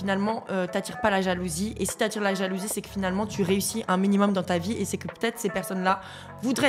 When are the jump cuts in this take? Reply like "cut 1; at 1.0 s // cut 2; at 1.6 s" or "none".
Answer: none